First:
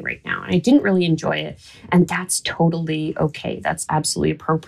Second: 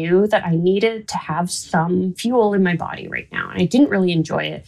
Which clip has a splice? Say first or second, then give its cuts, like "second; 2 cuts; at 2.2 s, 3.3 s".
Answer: second; 2 cuts; at 1.1 s, 2.2 s